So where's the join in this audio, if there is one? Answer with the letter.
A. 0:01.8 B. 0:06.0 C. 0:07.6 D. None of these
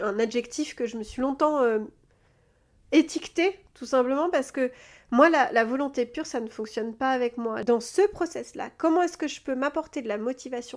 C